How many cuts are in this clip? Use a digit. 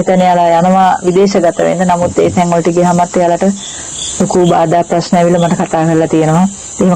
0